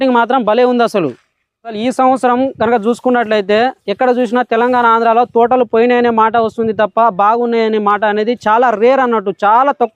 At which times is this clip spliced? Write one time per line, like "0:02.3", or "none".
0:01.8